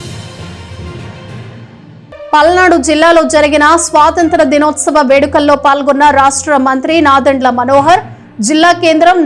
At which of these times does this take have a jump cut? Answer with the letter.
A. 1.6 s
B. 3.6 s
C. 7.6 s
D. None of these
A